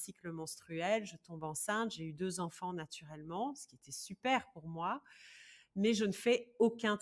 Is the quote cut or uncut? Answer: uncut